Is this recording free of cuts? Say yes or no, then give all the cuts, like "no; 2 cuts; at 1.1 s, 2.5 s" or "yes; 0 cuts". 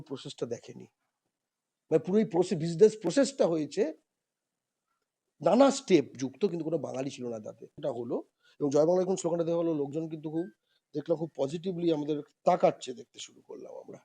no; 1 cut; at 7.8 s